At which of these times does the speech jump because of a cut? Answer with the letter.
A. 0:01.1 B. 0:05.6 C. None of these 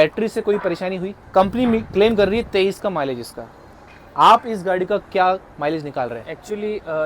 A